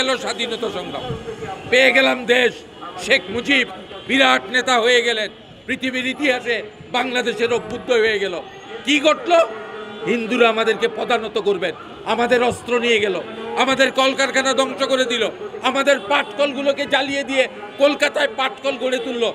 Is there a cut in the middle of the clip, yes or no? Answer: no